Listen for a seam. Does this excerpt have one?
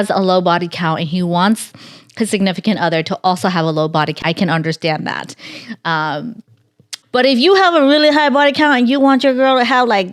yes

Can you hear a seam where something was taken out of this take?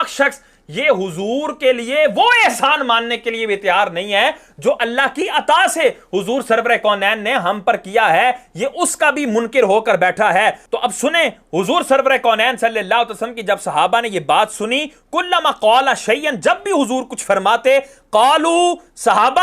no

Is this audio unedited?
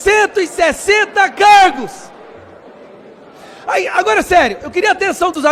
yes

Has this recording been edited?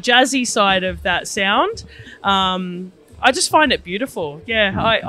no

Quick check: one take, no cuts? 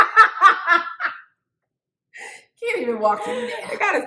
yes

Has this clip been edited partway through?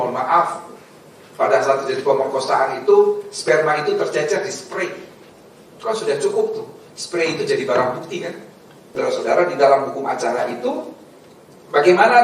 yes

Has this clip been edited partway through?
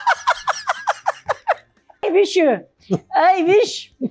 yes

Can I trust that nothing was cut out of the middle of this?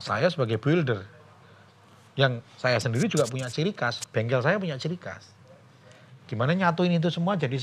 yes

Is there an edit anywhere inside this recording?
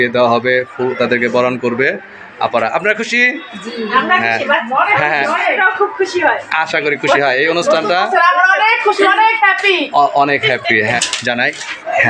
yes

